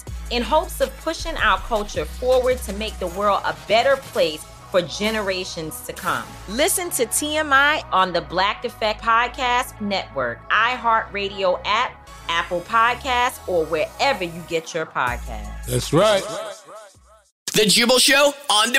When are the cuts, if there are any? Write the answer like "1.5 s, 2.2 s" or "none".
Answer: 17.4 s